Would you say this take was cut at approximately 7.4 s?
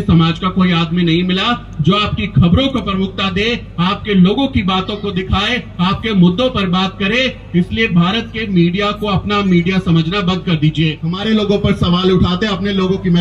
no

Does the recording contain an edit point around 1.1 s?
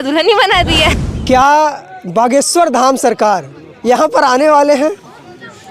yes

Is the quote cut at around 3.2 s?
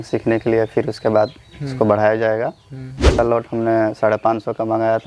yes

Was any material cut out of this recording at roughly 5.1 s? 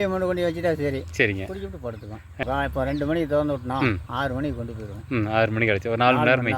no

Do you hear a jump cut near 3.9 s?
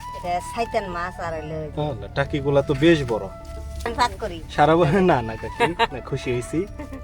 yes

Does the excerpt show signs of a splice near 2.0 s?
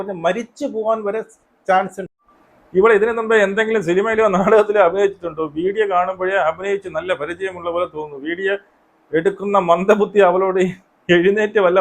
yes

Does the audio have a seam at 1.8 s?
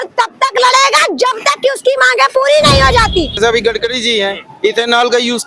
no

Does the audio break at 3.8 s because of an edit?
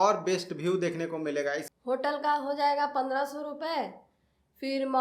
no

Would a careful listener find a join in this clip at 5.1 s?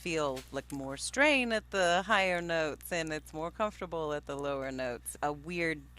yes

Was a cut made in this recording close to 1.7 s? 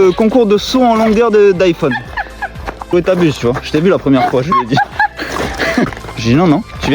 no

